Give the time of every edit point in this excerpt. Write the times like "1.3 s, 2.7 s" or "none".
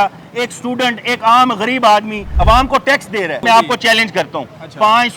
3.4 s